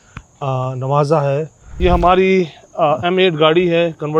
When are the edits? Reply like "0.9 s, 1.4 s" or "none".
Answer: 1.6 s